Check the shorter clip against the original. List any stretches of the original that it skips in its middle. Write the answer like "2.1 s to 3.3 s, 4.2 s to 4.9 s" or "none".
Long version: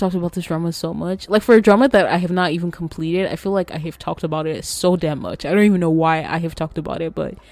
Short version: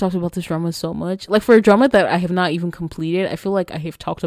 none

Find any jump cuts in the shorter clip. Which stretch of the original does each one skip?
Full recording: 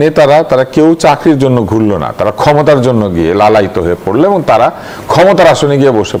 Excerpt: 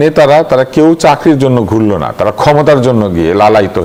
none

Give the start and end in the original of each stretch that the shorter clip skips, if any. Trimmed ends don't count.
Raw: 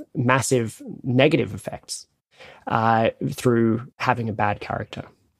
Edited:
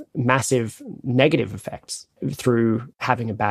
2.3 s to 3.3 s

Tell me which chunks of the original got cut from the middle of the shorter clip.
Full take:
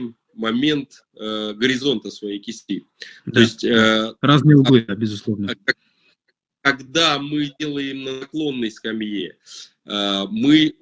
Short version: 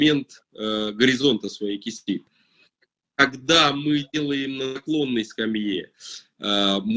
3.1 s to 5.9 s

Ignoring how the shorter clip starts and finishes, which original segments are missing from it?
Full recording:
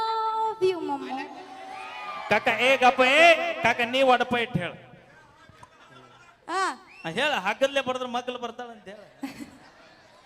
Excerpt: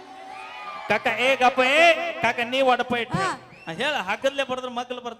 4.5 s to 6.5 s

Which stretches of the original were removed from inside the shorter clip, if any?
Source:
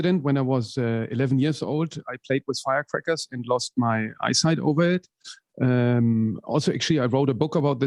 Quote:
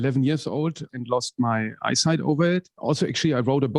2.1 s to 3.3 s, 5.1 s to 6.4 s

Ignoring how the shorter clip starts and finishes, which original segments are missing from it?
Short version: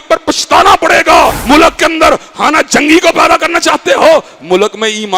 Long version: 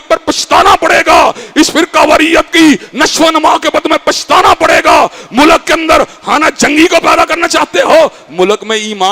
1.4 s to 5.3 s

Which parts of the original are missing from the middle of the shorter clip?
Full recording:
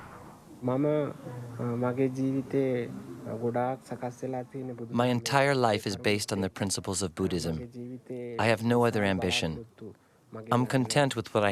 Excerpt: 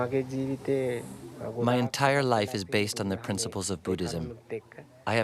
3.5 s to 4.9 s

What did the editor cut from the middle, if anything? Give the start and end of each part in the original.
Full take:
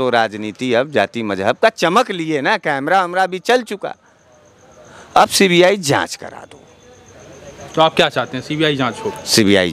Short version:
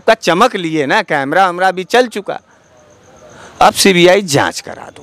none

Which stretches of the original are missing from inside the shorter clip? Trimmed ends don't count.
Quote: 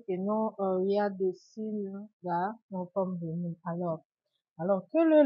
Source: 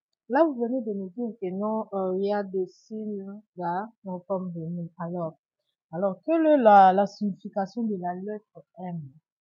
none

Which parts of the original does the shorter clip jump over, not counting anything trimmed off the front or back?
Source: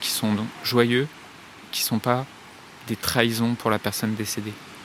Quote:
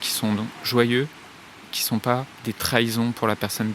2.3 s to 2.8 s

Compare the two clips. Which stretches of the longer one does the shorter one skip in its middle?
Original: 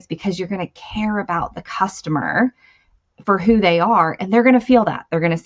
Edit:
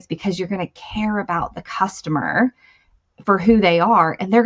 none

